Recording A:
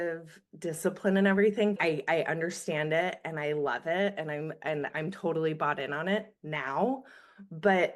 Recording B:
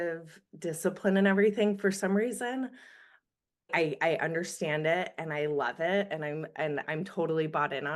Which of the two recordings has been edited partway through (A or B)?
A